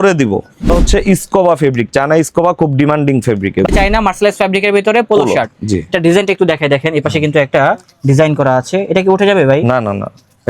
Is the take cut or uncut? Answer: cut